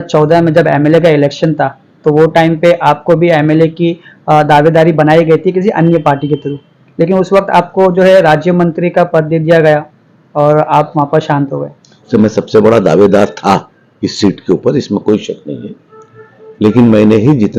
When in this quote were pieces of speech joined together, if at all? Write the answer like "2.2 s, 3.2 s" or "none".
12.1 s